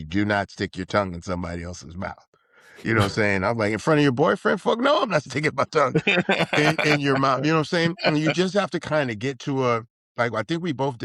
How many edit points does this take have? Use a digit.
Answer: 0